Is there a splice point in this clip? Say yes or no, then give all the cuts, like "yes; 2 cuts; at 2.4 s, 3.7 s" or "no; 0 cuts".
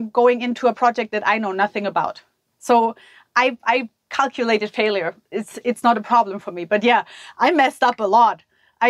no; 0 cuts